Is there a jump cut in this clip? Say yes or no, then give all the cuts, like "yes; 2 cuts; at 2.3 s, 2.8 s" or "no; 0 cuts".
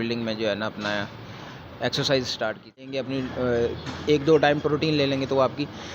yes; 1 cut; at 2.9 s